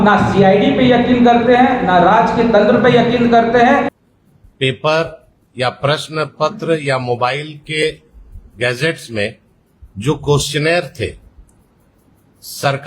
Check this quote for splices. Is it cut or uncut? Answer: cut